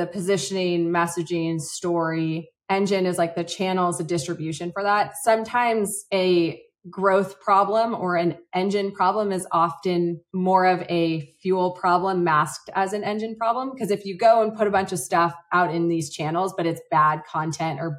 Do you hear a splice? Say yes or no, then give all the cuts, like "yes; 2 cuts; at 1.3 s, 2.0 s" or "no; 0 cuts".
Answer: no; 0 cuts